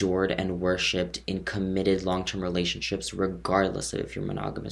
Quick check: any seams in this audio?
no; 0 cuts

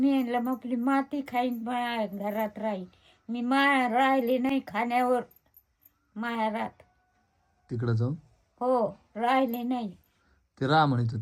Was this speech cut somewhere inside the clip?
no; 0 cuts

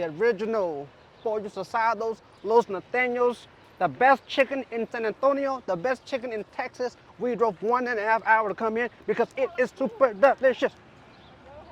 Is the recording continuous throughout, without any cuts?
yes; 0 cuts

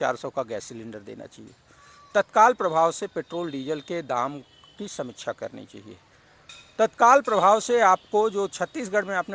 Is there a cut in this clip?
no; 0 cuts

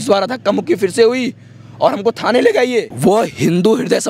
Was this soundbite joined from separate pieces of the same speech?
yes; 1 cut; at 2.9 s

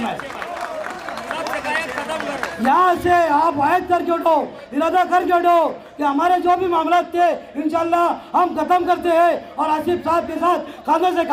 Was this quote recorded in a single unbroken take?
yes; 0 cuts

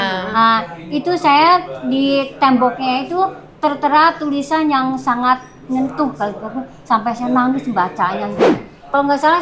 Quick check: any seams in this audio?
yes; 1 cut; at 8.5 s

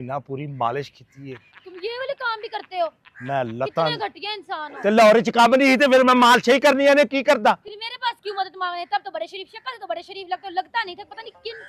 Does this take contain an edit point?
no; 0 cuts

